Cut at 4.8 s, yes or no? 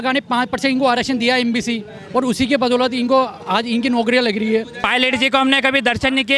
yes